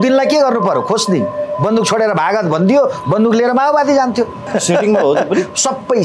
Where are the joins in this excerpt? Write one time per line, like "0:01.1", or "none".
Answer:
0:04.4